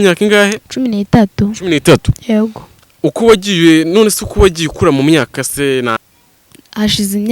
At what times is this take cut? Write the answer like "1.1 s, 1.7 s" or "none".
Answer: 6.0 s